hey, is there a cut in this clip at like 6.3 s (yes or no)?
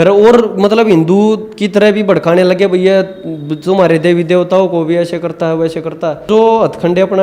yes